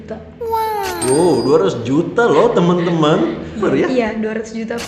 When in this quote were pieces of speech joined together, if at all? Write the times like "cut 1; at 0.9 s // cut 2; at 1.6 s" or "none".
cut 1; at 3.6 s